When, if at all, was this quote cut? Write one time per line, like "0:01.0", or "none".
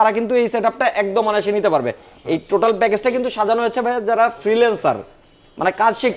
none